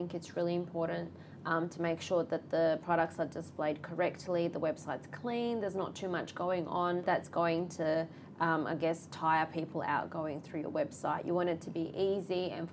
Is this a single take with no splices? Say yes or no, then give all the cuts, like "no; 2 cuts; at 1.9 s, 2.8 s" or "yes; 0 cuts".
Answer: no; 1 cut; at 7.0 s